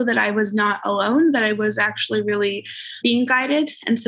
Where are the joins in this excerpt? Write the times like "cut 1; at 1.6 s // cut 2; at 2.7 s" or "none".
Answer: cut 1; at 3.0 s